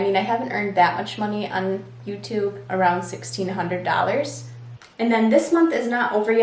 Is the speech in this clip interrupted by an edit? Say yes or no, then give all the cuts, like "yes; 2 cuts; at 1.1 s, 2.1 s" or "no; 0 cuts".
yes; 2 cuts; at 2.6 s, 4.5 s